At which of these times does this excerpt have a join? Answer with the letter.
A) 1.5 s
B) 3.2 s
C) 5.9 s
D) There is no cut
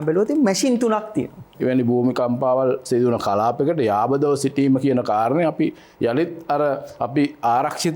A